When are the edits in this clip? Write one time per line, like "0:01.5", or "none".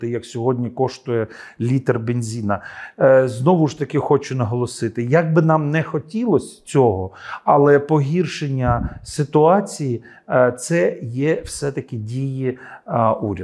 none